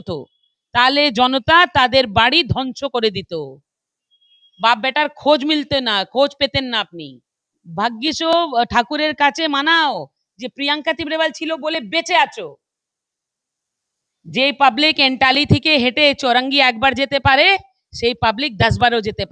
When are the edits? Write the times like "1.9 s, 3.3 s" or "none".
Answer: 7.6 s